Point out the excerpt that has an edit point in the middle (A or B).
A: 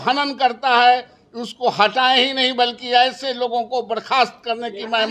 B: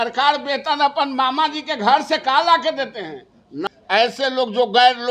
B